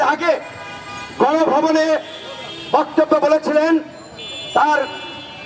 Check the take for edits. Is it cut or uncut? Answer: uncut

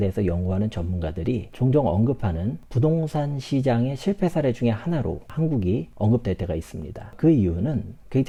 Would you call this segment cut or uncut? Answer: uncut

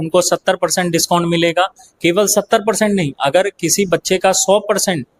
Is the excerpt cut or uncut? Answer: uncut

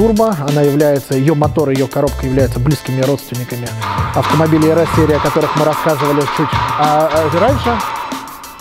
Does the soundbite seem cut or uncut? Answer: uncut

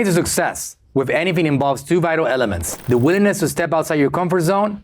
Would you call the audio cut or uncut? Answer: uncut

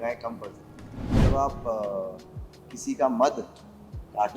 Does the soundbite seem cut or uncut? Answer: cut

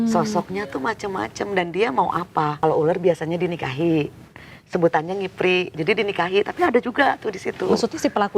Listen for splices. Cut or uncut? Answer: cut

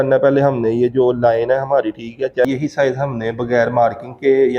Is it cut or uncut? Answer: cut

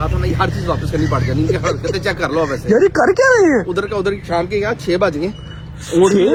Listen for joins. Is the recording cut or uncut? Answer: uncut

